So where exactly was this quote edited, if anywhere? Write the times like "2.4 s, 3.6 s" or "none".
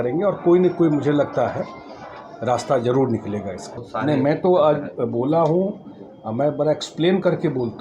3.8 s